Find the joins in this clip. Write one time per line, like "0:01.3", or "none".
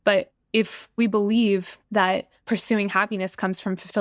0:00.9
0:02.0